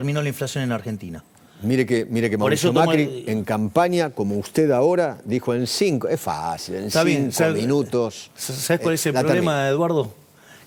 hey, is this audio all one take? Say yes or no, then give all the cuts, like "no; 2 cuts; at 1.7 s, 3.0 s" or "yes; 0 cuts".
yes; 0 cuts